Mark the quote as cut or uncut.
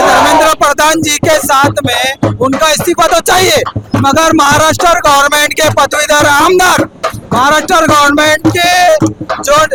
uncut